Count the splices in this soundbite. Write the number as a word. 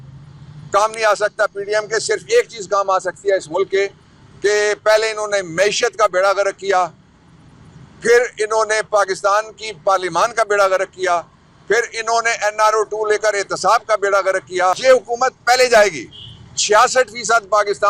one